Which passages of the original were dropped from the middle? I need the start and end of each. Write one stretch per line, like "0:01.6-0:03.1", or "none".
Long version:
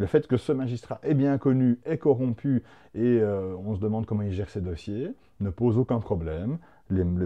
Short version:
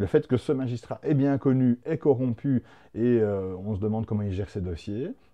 none

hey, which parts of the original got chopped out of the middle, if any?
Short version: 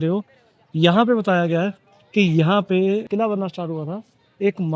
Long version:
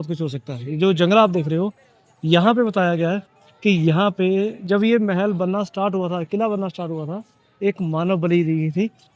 0:04.6-0:06.3

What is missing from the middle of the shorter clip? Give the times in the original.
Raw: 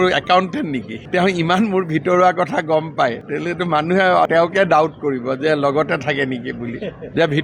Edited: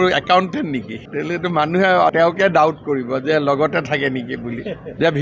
0:01.0-0:03.2

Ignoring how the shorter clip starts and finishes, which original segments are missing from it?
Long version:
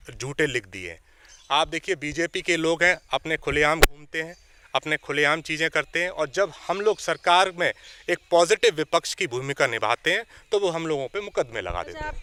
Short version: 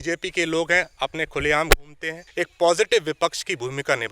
0:04.3-0:07.9

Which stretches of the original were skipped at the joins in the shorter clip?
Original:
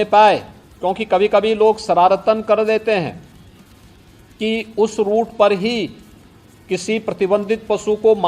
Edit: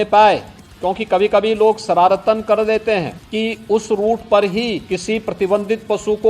0:03.2-0:04.3
0:05.9-0:06.6

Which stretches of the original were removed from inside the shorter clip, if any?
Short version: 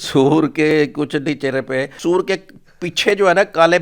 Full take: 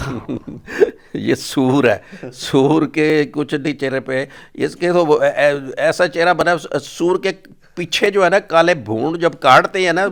0:04.3-0:06.9

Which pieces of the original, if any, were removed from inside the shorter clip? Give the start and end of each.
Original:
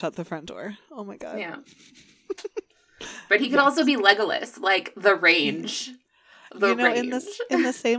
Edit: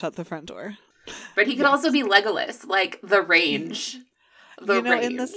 0:00.9-0:02.8

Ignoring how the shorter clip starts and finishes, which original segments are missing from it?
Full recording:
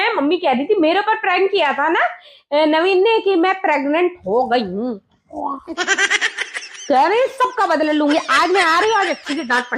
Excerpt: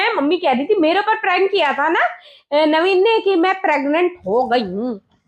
none

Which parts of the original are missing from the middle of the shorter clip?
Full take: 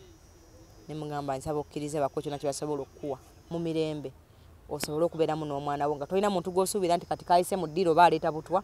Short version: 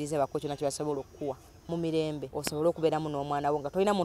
0:04.1-0:04.6

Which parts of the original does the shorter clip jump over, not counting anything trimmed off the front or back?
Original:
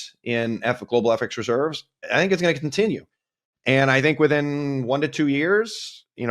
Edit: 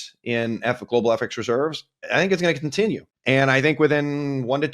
0:03.1-0:03.5

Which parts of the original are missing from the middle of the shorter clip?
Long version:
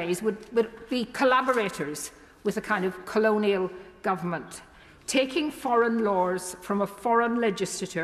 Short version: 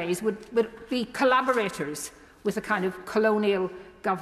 none

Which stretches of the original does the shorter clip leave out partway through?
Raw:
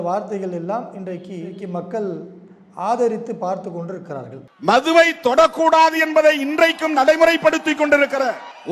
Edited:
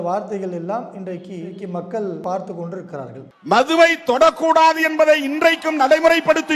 0:02.2-0:03.4

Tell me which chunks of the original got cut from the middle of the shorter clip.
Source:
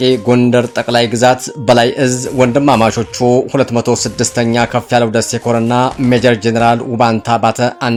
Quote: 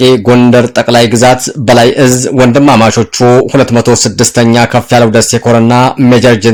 none

